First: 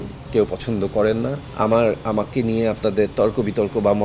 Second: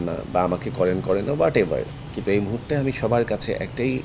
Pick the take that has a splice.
first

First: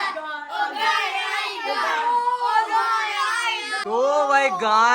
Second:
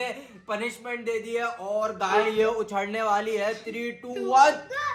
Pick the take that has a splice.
first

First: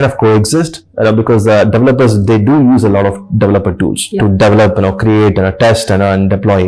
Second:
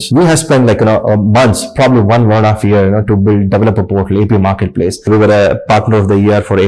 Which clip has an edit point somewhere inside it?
second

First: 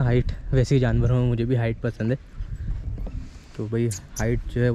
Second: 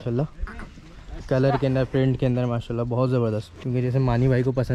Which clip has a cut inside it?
second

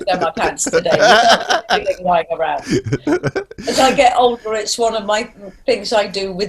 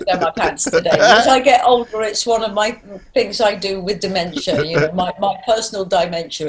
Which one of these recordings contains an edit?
second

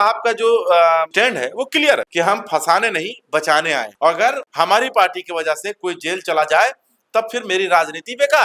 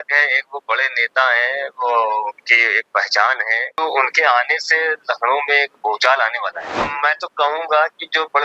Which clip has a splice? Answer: second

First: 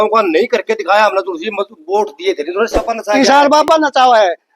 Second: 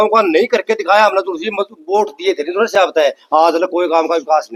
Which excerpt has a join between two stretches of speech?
first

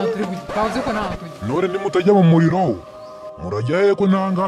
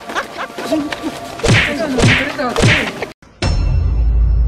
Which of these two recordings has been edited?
second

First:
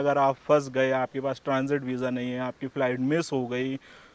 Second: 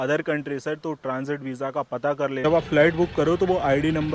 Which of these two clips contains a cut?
second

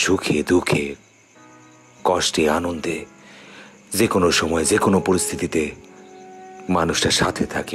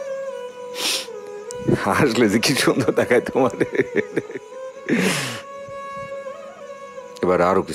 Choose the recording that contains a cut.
second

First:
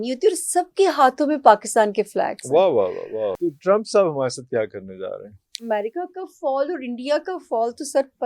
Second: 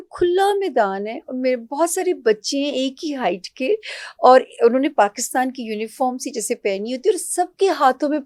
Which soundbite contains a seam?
first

